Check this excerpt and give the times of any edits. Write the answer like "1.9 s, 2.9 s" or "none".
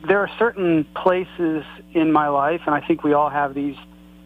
0.9 s